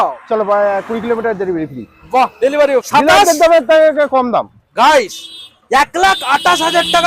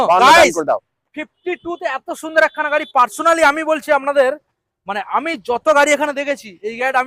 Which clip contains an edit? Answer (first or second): first